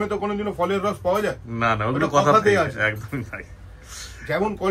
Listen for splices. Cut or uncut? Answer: uncut